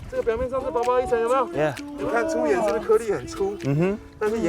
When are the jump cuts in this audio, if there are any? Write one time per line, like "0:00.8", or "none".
0:01.9